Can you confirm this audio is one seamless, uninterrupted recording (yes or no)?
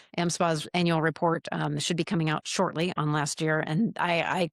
yes